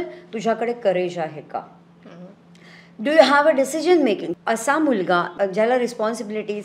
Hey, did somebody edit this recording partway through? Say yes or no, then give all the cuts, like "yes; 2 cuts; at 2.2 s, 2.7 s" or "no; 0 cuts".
yes; 2 cuts; at 4.3 s, 5.3 s